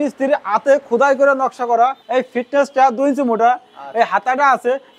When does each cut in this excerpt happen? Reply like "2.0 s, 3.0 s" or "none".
2.0 s